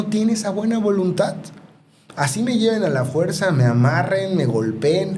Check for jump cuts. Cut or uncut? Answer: uncut